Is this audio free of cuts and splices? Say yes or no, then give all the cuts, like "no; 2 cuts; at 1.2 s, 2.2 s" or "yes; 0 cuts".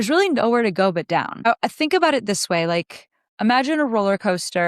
no; 1 cut; at 1.5 s